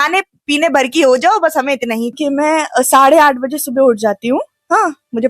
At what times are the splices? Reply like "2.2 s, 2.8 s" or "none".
2.2 s